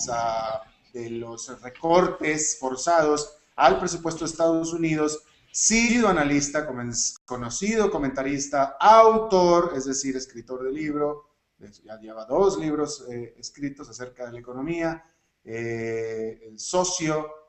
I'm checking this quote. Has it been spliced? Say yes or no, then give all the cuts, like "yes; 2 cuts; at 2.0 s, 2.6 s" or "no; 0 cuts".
no; 0 cuts